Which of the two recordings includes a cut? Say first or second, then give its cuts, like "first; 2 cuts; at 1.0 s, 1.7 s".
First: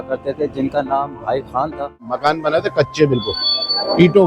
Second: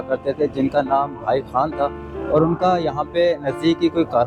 first; 1 cut; at 2.1 s